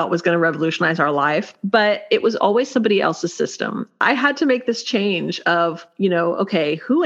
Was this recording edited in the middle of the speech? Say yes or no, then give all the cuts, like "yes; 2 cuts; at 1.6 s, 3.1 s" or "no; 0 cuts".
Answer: yes; 3 cuts; at 1.6 s, 3.9 s, 5.8 s